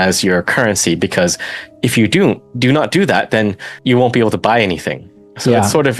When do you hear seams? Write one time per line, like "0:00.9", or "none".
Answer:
none